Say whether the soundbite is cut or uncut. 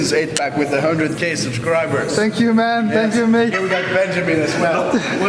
uncut